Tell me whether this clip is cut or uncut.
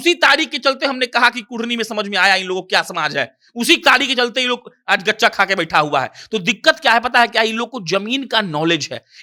uncut